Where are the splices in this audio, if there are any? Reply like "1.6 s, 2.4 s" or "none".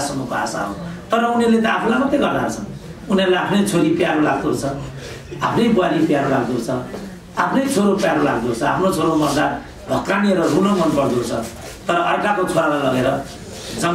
none